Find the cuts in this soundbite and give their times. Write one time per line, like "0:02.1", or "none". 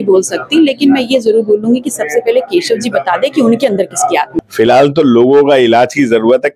0:04.4